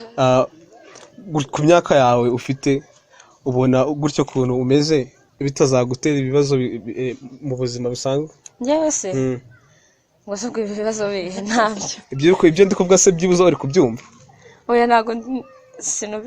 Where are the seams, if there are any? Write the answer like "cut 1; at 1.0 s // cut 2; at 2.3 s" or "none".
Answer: none